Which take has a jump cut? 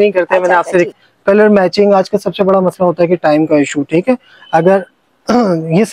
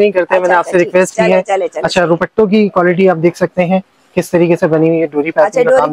first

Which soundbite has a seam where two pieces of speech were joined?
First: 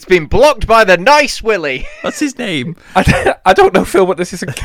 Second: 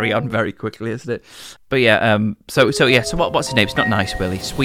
first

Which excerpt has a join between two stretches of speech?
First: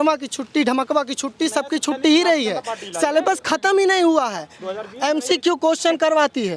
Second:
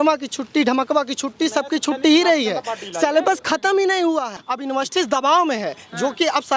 second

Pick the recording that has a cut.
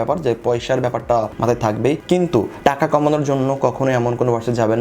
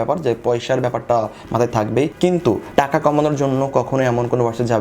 first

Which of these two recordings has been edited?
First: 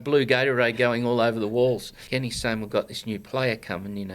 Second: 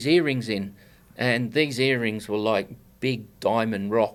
first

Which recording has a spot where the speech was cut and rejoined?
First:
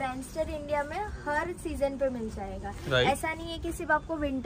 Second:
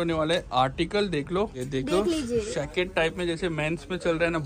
second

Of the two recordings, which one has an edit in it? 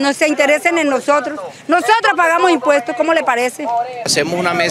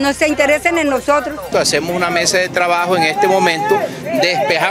second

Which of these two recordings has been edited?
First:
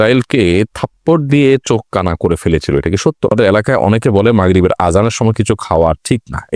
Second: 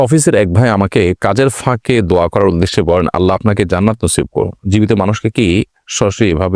first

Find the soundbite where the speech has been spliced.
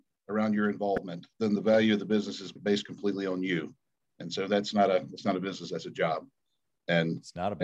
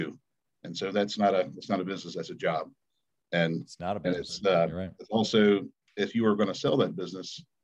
first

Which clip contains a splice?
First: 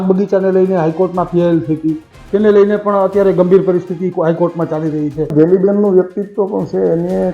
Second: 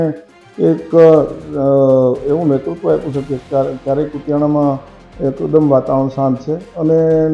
first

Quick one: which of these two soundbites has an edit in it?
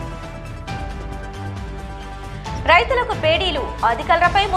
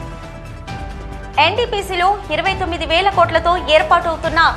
second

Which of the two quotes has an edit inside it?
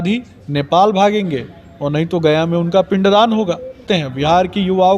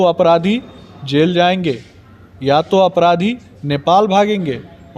first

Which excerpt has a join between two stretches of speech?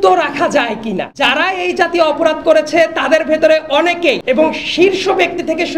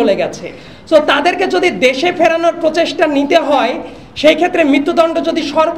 first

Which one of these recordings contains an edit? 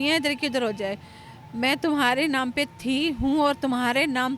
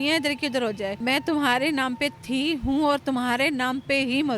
second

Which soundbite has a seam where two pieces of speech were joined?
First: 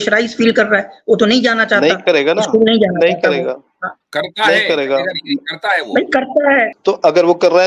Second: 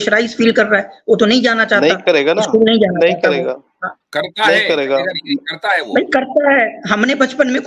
first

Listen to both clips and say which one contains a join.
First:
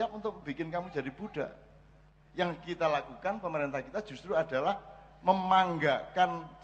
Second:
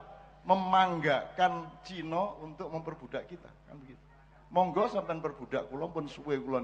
first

